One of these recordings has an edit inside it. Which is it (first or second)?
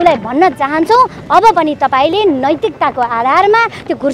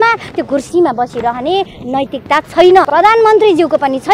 second